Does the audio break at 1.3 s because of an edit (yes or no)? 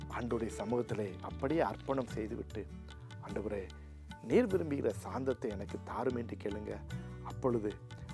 yes